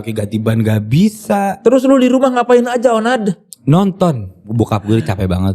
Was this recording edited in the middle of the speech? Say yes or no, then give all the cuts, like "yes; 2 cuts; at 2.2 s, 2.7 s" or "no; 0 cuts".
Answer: yes; 1 cut; at 4.5 s